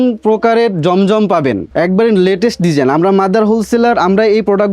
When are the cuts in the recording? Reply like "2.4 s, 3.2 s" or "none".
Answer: 1.7 s